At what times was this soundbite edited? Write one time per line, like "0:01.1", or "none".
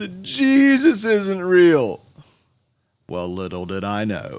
none